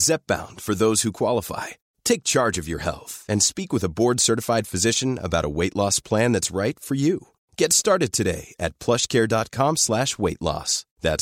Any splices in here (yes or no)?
no